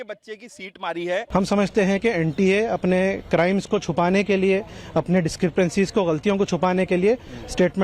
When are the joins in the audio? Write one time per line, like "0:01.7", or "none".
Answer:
0:01.2